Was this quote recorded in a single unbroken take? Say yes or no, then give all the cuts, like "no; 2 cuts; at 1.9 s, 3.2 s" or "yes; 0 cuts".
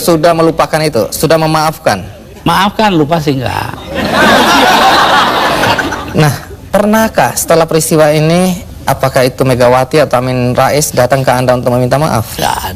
yes; 0 cuts